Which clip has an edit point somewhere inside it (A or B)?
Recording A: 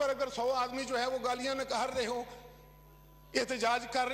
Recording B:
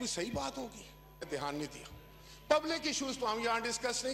B